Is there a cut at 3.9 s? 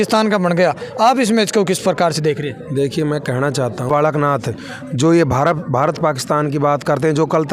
yes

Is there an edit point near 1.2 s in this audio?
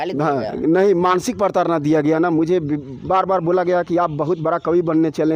no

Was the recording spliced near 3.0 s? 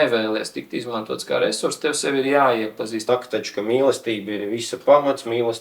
yes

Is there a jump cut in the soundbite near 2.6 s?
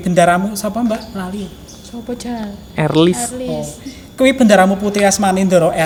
no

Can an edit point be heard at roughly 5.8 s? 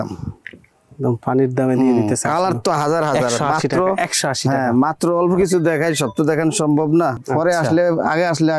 no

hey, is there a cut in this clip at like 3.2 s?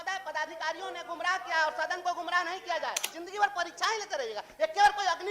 yes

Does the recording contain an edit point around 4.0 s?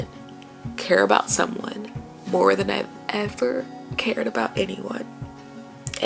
no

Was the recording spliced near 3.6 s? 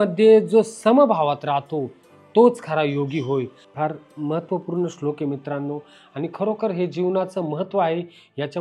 yes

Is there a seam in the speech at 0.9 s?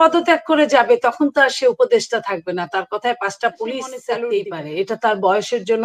no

